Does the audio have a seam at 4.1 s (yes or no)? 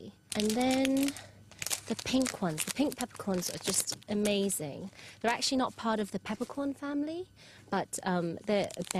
yes